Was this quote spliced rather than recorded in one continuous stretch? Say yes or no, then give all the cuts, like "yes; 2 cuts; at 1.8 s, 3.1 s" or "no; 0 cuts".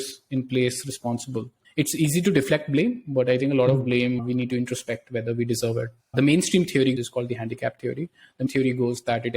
yes; 3 cuts; at 6.0 s, 7.0 s, 8.5 s